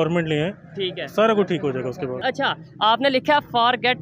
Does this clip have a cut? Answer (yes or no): yes